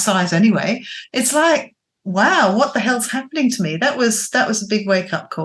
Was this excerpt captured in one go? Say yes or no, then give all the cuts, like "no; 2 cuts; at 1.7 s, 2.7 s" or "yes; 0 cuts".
yes; 0 cuts